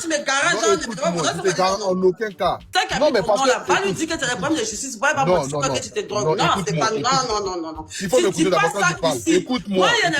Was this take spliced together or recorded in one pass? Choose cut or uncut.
cut